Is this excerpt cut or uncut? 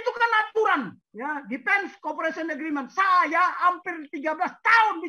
cut